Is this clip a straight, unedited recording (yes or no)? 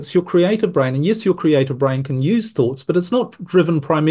yes